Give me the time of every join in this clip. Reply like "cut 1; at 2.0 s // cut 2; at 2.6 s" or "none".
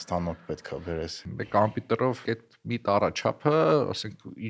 cut 1; at 1.2 s // cut 2; at 2.2 s